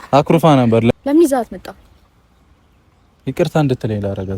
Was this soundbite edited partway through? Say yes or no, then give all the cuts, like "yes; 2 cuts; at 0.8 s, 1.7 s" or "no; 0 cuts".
yes; 1 cut; at 0.9 s